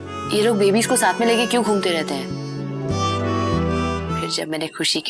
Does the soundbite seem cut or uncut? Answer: cut